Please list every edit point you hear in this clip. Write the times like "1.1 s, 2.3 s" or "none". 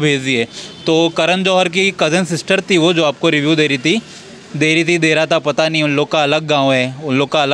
none